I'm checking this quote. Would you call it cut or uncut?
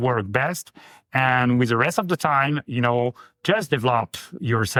uncut